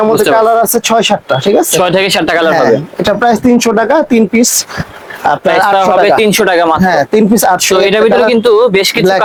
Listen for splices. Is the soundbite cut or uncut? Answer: uncut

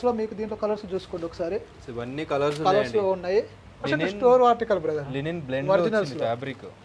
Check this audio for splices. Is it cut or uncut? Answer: cut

